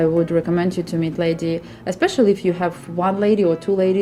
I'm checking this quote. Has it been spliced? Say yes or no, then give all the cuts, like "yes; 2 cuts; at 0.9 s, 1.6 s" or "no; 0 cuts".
no; 0 cuts